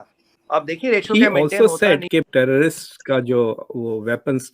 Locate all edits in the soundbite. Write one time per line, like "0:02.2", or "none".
0:01.1